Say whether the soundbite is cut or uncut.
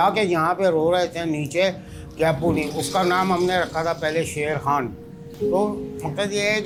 uncut